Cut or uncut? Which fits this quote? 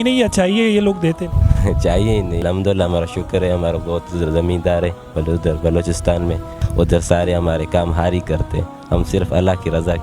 cut